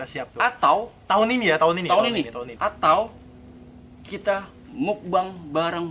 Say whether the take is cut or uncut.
cut